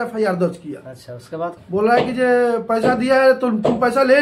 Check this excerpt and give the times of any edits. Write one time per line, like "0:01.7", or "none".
0:01.5